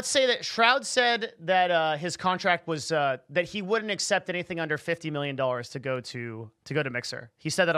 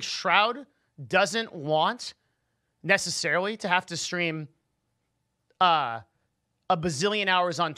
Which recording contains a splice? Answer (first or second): first